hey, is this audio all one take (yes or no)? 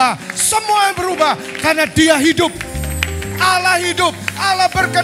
yes